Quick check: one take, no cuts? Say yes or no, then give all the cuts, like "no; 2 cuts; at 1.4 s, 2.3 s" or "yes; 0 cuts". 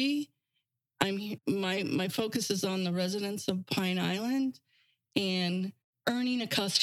no; 2 cuts; at 1.4 s, 5.8 s